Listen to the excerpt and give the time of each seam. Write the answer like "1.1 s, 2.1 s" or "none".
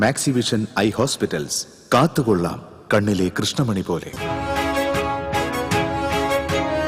4.1 s